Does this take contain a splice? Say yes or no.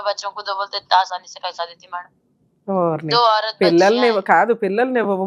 no